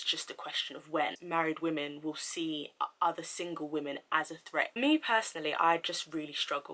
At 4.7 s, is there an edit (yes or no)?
yes